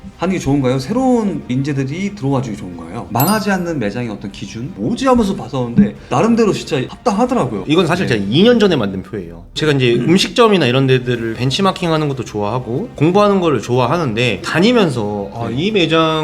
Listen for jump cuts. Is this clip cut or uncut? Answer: cut